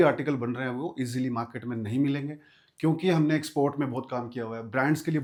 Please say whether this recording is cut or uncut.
uncut